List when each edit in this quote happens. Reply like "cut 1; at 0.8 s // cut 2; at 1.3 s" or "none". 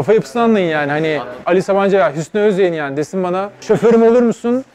cut 1; at 1.4 s // cut 2; at 3.6 s

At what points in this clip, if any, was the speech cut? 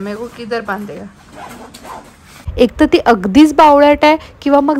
cut 1; at 2.4 s

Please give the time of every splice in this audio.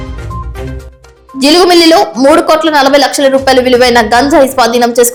none

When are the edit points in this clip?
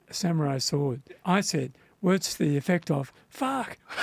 cut 1; at 1.2 s

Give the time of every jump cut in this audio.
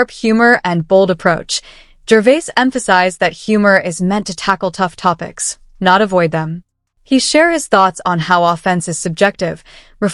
none

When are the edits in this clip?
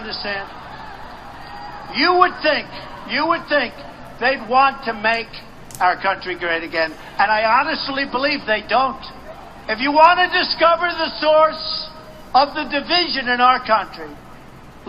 cut 1; at 2.4 s

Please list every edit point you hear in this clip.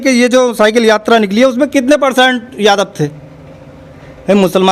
none

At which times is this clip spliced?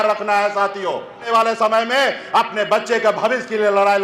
cut 1; at 1.2 s

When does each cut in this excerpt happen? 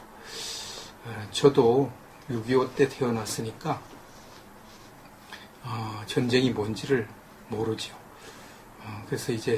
cut 1; at 2.0 s

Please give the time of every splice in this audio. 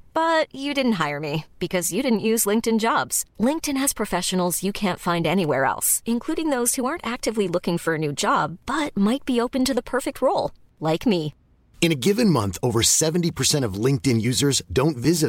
none

